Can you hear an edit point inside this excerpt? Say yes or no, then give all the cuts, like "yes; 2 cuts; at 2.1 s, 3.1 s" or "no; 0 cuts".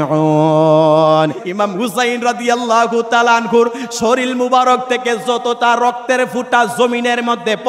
yes; 1 cut; at 1.4 s